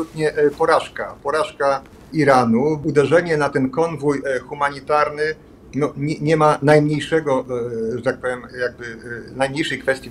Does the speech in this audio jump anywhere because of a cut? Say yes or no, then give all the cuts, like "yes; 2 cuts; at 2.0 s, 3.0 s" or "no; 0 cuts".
yes; 2 cuts; at 2.0 s, 2.8 s